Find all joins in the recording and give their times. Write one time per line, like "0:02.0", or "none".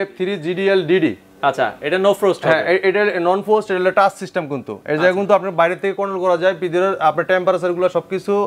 none